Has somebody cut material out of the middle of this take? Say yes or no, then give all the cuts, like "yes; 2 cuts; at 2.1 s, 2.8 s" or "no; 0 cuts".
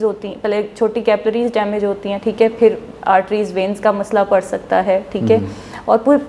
no; 0 cuts